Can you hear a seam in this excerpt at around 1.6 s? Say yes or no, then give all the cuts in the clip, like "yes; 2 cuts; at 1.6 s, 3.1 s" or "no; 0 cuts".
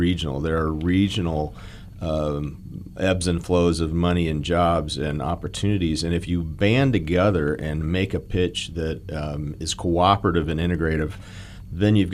no; 0 cuts